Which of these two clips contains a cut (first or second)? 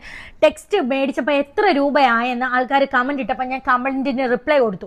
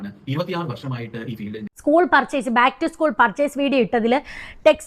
second